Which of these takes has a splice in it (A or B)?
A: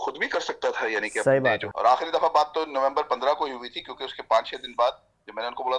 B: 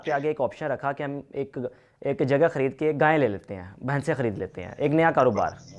A